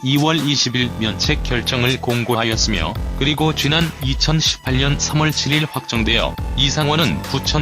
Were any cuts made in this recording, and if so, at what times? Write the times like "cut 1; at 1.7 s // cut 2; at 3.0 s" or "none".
cut 1; at 6.6 s